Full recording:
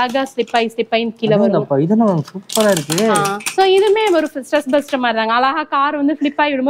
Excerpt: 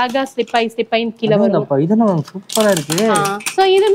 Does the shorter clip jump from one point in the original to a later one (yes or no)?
no